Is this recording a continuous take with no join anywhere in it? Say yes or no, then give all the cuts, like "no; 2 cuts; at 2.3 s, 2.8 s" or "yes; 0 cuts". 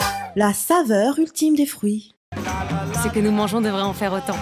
no; 1 cut; at 2.2 s